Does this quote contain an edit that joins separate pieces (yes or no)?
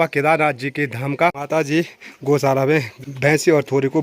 yes